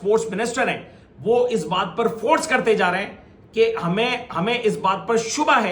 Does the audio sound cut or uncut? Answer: uncut